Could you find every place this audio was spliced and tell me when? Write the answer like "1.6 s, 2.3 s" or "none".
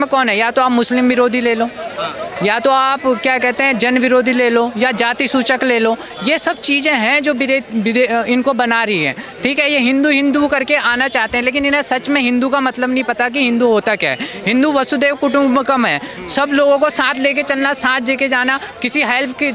none